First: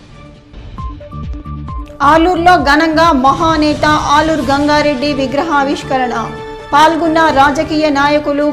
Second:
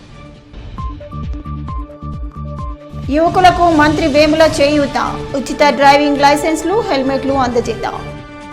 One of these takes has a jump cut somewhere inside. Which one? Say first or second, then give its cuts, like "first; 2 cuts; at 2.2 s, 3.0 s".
first; 1 cut; at 1.8 s